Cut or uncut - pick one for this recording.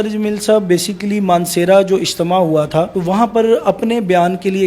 cut